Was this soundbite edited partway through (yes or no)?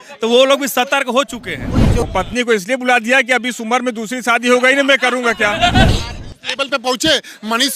yes